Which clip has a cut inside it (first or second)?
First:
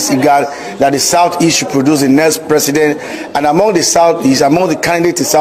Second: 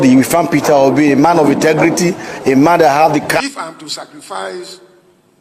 second